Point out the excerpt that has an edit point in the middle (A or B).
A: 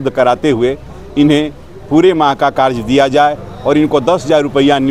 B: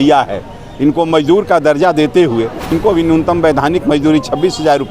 B